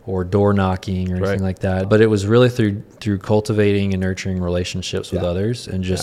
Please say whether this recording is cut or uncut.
cut